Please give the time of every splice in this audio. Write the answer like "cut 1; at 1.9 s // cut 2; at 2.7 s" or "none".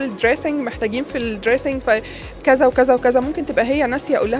none

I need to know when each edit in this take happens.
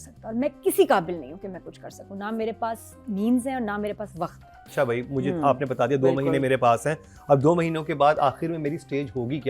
cut 1; at 4.7 s

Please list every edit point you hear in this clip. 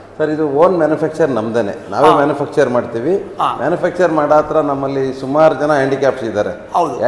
none

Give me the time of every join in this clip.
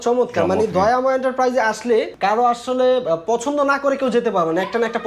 cut 1; at 2.1 s

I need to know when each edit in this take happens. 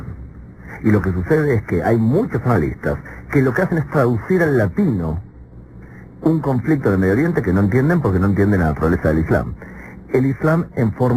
cut 1; at 3.2 s

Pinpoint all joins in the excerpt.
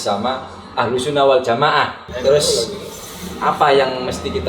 cut 1; at 2.0 s

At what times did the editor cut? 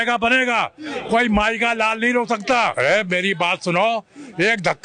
cut 1; at 2.7 s

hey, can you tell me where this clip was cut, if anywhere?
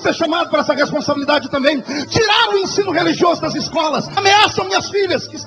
cut 1; at 4.1 s

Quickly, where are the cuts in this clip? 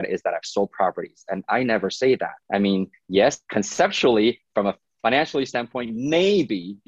cut 1; at 2.4 s // cut 2; at 3.4 s

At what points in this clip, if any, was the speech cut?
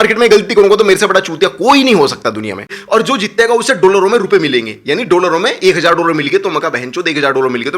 cut 1; at 2.8 s

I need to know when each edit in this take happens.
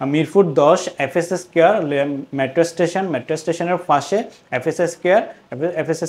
none

